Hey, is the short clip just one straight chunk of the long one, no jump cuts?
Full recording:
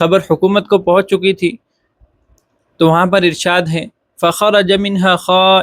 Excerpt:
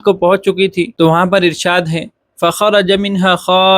no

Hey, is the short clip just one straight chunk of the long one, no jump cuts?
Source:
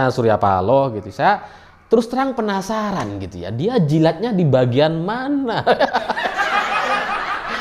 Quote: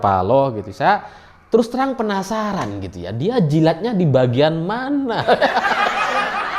no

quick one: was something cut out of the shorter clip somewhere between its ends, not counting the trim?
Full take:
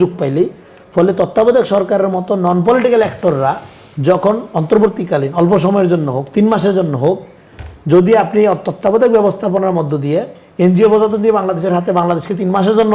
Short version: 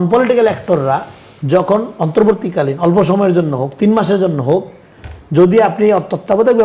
no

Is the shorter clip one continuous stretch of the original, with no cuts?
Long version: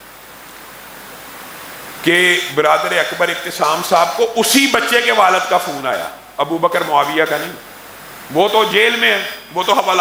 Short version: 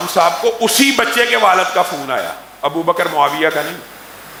yes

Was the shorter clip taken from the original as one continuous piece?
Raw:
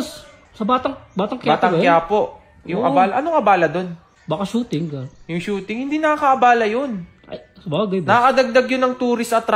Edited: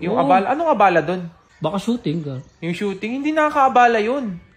yes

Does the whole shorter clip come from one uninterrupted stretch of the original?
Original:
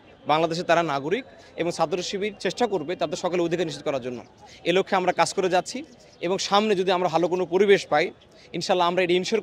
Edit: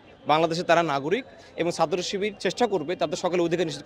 yes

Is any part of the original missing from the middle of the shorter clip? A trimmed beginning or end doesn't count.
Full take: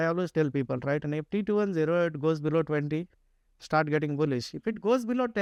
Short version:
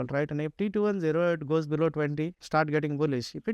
yes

